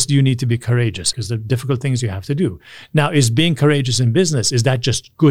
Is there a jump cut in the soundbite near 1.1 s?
yes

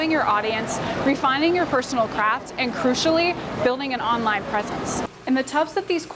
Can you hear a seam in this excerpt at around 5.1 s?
yes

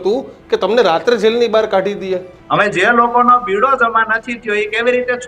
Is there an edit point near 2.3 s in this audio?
yes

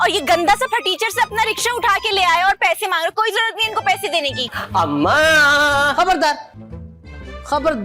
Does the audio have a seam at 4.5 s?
yes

